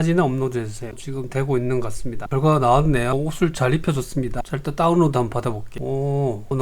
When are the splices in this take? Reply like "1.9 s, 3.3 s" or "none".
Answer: 1.0 s, 2.2 s, 5.8 s